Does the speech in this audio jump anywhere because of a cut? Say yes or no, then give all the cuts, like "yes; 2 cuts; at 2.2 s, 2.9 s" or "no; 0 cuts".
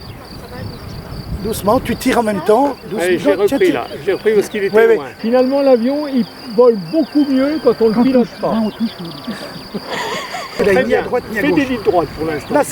yes; 2 cuts; at 5.1 s, 10.5 s